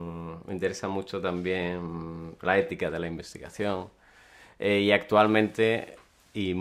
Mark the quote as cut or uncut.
uncut